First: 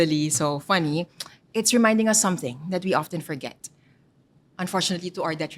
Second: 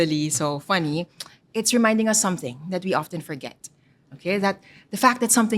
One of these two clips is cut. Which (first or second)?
second